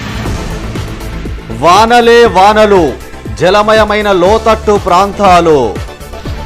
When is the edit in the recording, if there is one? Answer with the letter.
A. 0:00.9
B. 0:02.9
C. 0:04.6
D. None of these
A